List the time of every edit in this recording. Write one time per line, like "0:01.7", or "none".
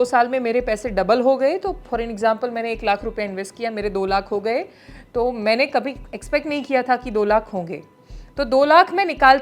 none